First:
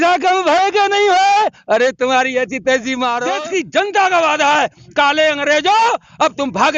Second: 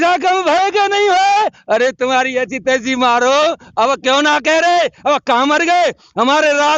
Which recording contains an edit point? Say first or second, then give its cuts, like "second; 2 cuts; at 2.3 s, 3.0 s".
first; 1 cut; at 3.4 s